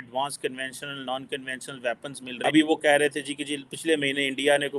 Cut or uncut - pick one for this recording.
cut